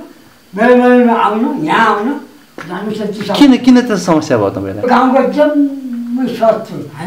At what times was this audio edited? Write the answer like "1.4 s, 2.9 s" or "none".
4.9 s